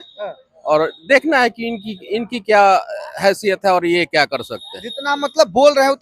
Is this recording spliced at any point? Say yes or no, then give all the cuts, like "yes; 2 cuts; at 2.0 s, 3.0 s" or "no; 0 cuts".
no; 0 cuts